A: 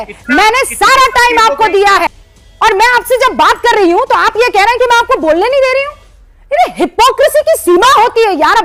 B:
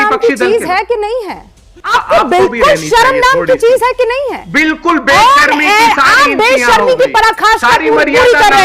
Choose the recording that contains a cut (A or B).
B